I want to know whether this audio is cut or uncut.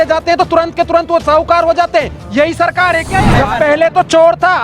cut